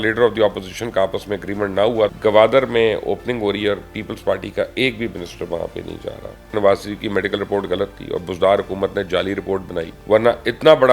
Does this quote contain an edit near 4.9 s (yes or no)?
no